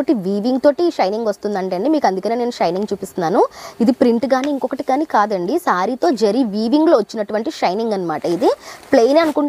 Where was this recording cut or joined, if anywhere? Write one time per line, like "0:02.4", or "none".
none